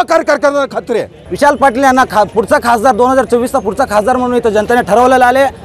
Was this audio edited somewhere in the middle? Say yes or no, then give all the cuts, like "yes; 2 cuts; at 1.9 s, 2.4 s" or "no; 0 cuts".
yes; 1 cut; at 1.2 s